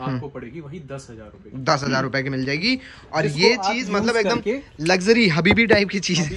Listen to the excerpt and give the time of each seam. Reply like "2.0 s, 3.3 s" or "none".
none